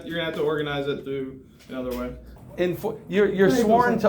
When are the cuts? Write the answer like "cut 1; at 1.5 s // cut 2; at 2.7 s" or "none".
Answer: cut 1; at 2.3 s